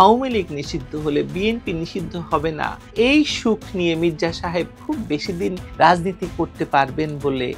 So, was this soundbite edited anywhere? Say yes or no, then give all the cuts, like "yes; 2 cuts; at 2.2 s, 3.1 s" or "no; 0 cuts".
no; 0 cuts